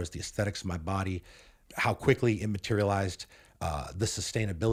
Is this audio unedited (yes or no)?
yes